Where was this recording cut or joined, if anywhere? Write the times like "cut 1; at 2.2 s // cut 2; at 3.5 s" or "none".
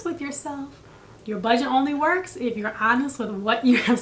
none